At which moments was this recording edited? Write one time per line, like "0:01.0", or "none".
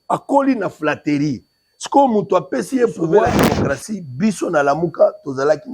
0:03.5

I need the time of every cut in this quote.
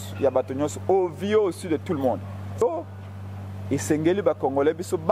0:02.6

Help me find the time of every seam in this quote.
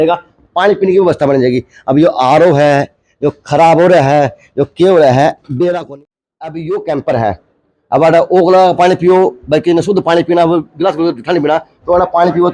0:05.8

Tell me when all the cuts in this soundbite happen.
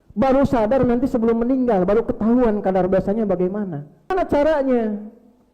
0:04.1

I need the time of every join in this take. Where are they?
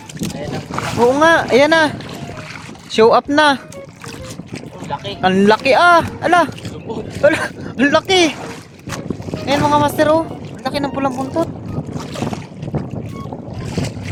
none

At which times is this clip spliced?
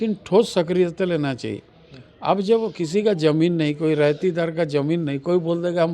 none

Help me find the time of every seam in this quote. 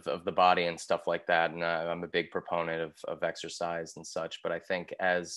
none

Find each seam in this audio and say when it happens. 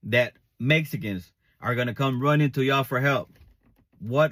none

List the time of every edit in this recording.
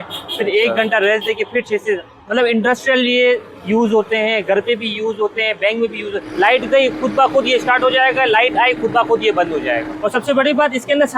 0:06.2
0:09.9

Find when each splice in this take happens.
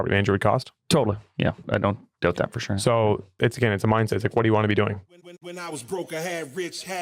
0:01.6
0:03.4
0:05.1

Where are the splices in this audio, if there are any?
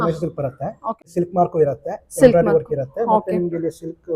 0:01.0

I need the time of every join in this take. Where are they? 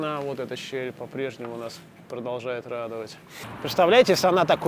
0:03.4

